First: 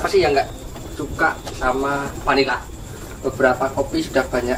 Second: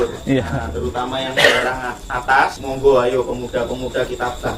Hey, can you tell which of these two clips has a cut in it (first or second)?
second